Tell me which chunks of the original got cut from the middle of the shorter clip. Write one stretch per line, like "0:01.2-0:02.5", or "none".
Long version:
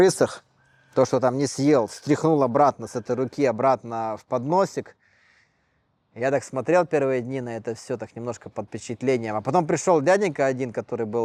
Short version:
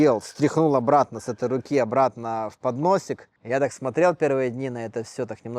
0:05.0-0:06.0